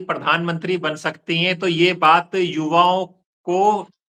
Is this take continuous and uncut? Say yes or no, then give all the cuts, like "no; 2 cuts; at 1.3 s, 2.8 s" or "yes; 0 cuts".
yes; 0 cuts